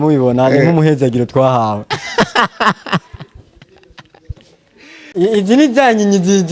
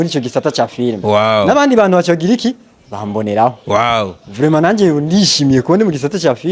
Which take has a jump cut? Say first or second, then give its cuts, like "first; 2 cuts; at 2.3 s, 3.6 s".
first; 1 cut; at 5.0 s